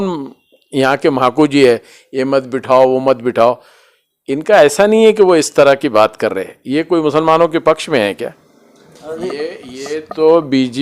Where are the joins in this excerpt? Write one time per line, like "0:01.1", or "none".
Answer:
none